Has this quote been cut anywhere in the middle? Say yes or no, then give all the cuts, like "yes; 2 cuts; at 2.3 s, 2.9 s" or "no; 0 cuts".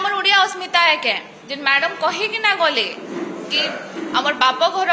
yes; 1 cut; at 1.3 s